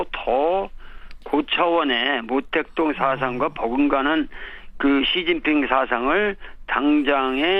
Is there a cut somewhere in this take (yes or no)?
no